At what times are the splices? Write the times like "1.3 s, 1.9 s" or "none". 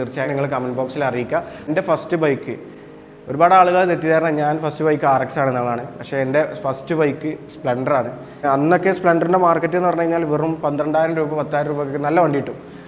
1.6 s, 8.4 s